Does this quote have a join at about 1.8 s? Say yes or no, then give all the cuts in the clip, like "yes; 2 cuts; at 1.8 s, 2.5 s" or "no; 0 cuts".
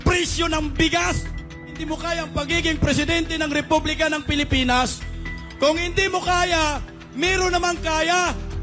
yes; 1 cut; at 1.8 s